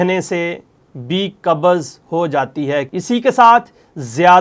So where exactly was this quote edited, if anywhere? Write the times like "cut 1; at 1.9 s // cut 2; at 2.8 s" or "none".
cut 1; at 2.9 s